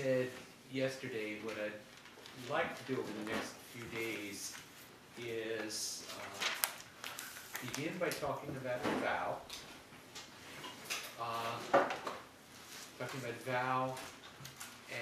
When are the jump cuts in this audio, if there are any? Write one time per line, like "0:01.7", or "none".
none